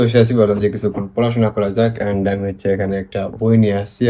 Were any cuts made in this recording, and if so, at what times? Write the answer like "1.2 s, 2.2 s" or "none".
none